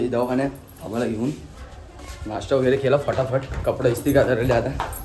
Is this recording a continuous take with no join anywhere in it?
yes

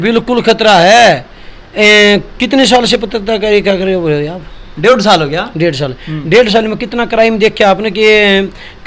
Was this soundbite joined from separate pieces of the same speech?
no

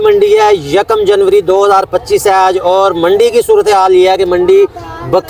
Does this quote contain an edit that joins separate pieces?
no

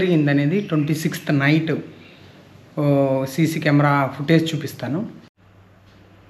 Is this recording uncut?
yes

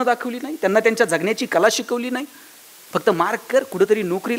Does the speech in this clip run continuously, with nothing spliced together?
yes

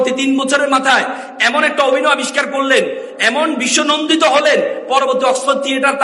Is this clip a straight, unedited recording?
yes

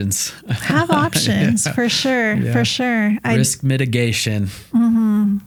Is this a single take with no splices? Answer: yes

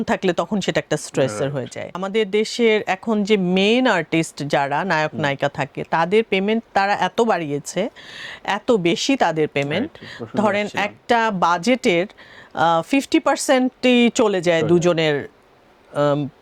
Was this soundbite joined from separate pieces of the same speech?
yes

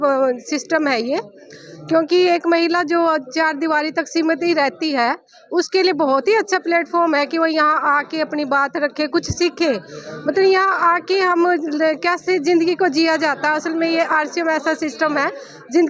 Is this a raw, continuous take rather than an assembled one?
yes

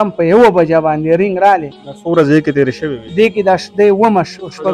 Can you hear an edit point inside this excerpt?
no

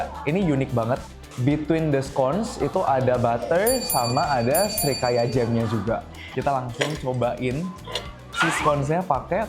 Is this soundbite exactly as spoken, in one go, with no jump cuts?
no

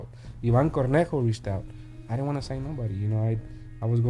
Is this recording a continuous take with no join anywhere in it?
yes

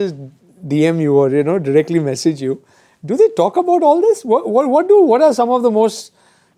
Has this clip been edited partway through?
no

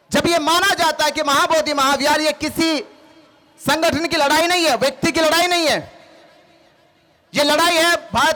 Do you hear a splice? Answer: no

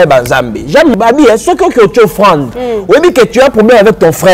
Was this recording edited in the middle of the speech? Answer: yes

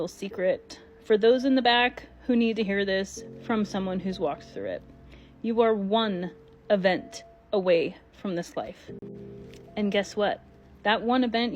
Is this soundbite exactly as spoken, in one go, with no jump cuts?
yes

